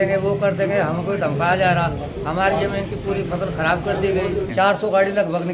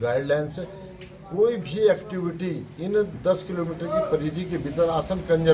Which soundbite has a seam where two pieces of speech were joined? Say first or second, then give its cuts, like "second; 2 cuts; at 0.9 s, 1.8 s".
first; 1 cut; at 4.5 s